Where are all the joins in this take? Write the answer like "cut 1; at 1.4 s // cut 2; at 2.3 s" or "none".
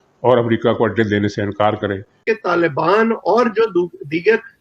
cut 1; at 2.2 s